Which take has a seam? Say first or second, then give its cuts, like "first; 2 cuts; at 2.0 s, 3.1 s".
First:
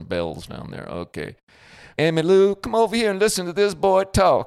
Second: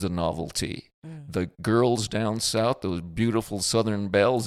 first; 1 cut; at 1.8 s